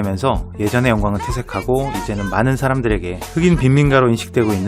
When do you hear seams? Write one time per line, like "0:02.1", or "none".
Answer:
0:01.4